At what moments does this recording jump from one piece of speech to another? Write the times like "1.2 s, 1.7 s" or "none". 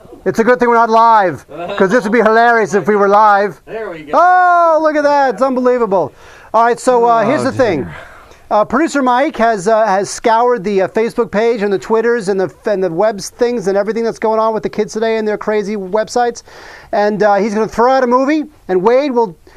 11.1 s